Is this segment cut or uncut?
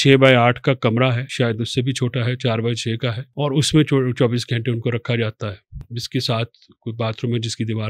cut